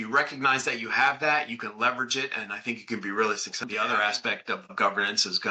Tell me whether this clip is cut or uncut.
cut